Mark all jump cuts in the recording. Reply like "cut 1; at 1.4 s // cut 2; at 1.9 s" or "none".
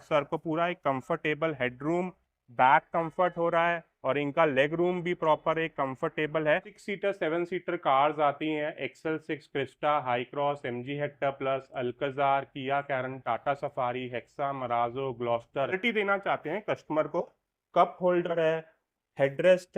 cut 1; at 6.8 s // cut 2; at 15.8 s